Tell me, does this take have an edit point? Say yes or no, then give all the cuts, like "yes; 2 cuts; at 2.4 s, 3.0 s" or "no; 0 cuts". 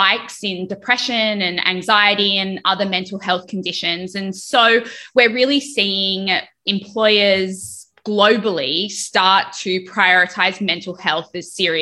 yes; 2 cuts; at 4.4 s, 6.6 s